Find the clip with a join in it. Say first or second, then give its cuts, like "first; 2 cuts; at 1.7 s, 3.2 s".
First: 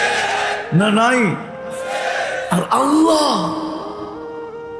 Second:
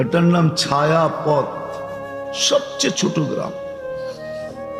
first; 1 cut; at 3.8 s